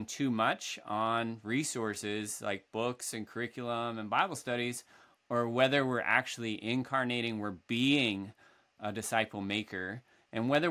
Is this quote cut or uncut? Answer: uncut